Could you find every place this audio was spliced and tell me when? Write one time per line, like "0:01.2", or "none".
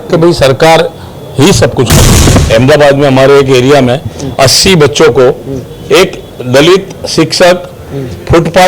0:02.4